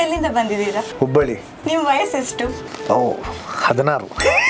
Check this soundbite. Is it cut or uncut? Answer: cut